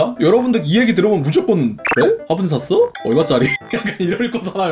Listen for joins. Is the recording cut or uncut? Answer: cut